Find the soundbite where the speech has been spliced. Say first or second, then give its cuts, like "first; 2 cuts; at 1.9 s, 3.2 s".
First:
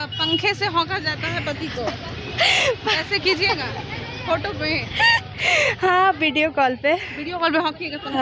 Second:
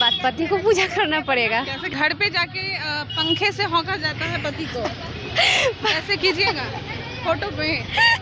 second; 1 cut; at 1.9 s